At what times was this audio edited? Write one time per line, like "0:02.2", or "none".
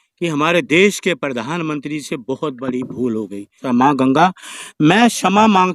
0:03.6